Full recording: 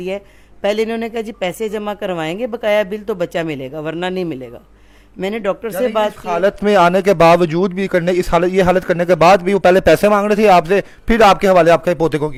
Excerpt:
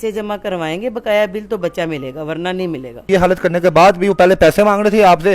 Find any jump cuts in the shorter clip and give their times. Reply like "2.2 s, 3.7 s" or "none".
3.1 s